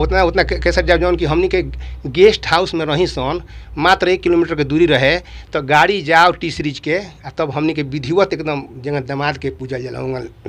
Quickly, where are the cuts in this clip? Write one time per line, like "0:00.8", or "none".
none

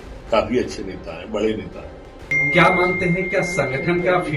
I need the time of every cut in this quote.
0:02.3

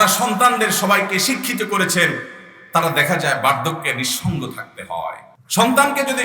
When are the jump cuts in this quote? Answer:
0:05.3

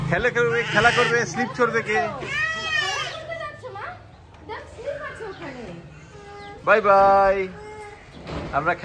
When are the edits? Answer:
none

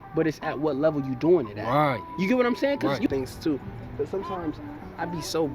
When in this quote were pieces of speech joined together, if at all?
0:03.1

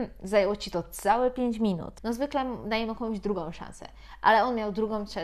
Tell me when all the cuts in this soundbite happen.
0:01.9

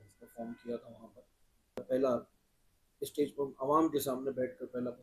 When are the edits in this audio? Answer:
0:01.8

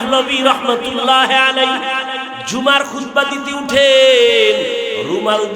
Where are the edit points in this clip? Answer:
0:02.3

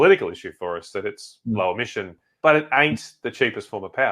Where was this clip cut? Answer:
0:02.2

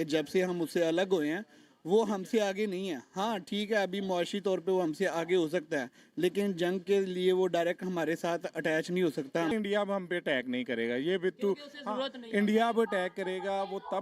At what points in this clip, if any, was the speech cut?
0:09.5

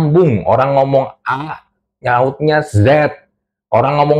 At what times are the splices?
none

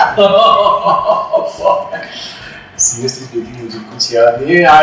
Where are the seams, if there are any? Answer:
none

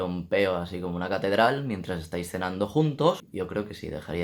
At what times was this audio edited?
0:03.2

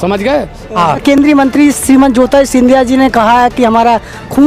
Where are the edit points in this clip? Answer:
0:01.0

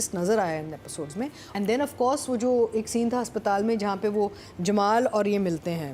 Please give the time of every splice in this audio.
0:01.4

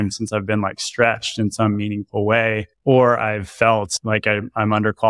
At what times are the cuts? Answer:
0:02.7
0:04.0

